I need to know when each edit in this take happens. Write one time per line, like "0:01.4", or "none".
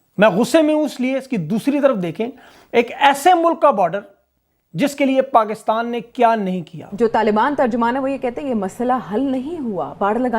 0:06.8